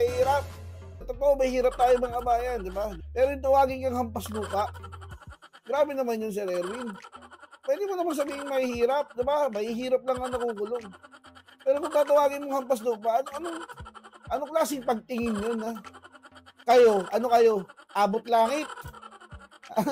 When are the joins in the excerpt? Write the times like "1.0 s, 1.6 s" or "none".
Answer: 1.1 s, 3.0 s